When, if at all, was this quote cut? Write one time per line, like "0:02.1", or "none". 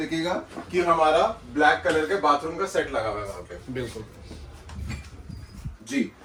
none

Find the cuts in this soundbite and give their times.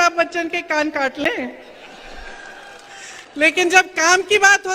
none

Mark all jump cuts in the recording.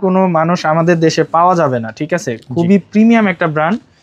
none

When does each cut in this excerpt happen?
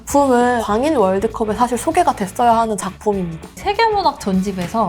0:03.5

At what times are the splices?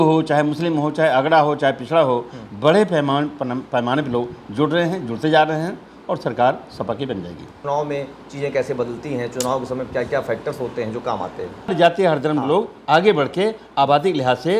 0:07.5
0:11.7

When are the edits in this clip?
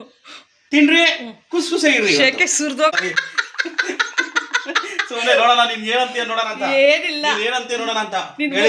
0:02.9

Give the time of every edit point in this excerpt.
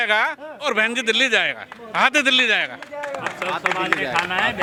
none

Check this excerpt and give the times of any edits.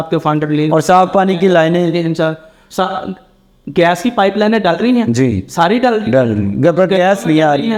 none

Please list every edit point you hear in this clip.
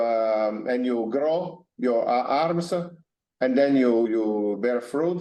0:04.1

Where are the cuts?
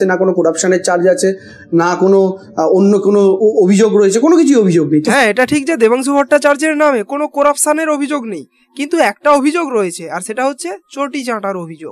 none

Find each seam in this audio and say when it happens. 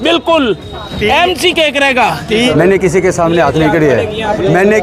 0:02.5

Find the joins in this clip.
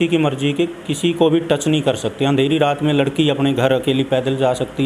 none

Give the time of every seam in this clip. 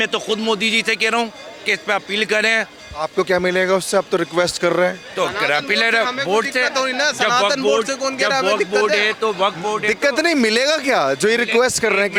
none

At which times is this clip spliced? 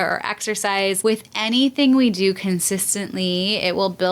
0:01.0

